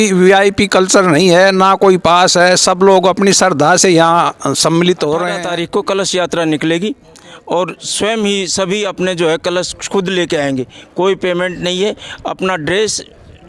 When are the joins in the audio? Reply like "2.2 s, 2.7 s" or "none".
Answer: 5.3 s